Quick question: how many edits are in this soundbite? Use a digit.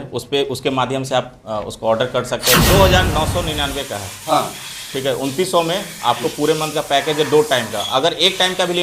1